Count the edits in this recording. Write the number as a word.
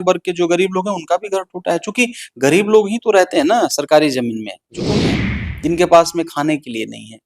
one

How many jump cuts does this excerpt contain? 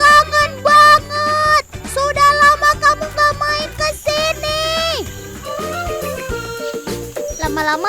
one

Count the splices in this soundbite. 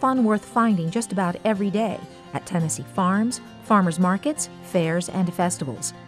zero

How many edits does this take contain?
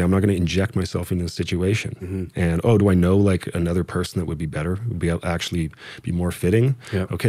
zero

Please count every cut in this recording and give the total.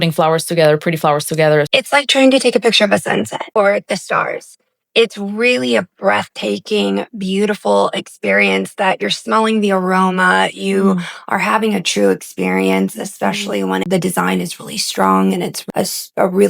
four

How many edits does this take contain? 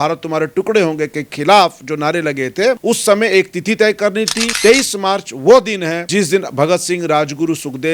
three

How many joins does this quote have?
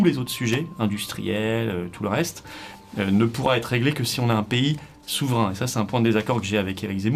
zero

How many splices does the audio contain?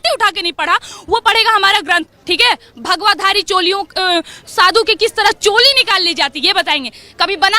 one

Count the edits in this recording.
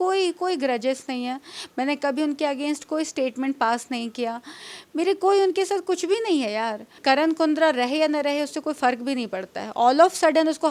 one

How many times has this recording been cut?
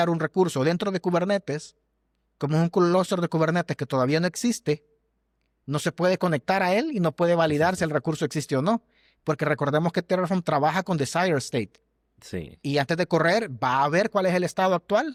zero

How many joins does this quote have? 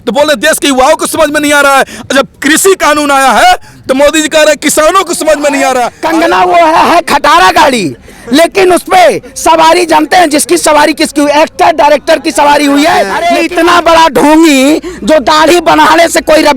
two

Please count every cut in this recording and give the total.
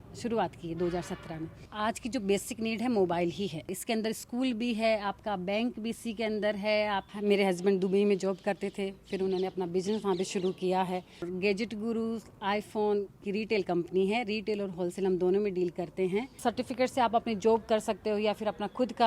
five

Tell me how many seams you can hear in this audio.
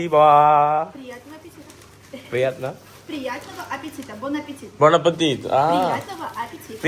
zero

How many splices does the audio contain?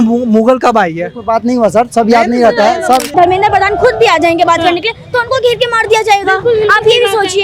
one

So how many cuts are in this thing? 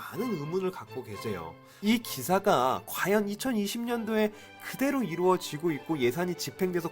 one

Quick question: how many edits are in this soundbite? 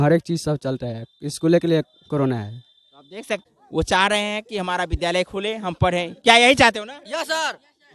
one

